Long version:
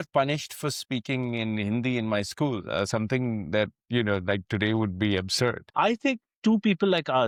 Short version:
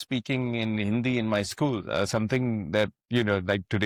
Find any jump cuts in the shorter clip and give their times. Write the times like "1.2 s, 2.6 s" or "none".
none